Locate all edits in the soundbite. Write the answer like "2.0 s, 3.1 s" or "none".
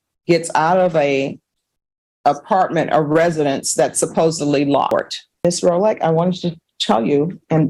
5.4 s